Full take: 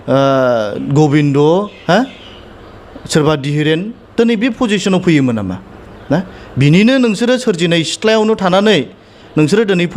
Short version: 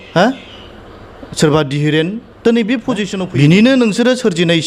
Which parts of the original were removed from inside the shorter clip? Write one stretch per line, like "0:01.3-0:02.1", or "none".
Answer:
0:04.9-0:06.4